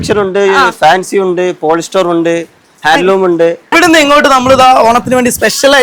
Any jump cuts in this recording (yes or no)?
yes